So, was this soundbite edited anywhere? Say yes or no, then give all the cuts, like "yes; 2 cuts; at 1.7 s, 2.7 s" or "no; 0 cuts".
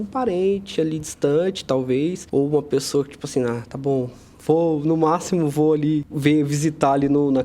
yes; 2 cuts; at 2.2 s, 6.1 s